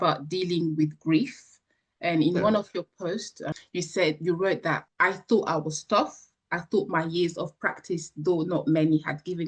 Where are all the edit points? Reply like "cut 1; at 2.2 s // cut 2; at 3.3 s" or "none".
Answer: cut 1; at 3.4 s // cut 2; at 4.9 s